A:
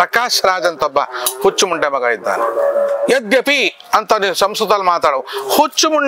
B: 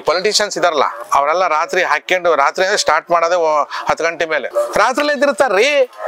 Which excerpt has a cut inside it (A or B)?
B